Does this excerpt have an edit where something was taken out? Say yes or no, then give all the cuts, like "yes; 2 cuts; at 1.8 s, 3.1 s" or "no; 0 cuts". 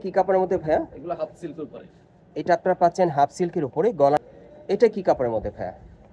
yes; 1 cut; at 4.2 s